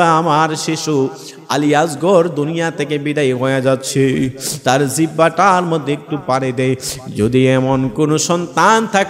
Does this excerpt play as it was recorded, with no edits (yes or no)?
yes